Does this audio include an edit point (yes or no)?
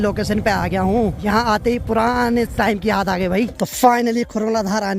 no